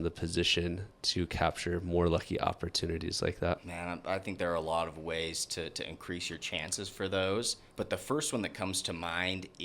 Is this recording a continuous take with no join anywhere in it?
no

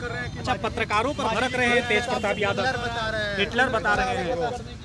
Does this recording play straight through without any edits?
yes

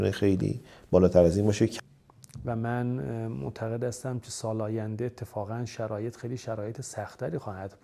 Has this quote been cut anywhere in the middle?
yes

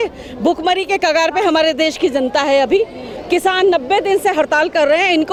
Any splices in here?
no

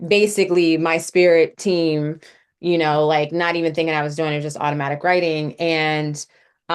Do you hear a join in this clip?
no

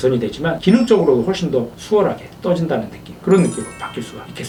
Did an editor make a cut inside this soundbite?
no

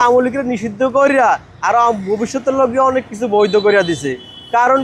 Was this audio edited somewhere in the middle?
no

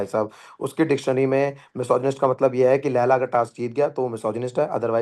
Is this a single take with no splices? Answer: yes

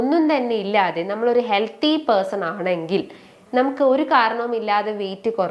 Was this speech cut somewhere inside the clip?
no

